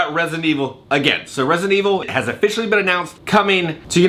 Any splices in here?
no; 0 cuts

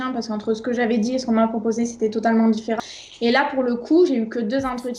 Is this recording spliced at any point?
yes; 1 cut; at 2.8 s

